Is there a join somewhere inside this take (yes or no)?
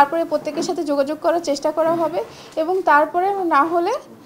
no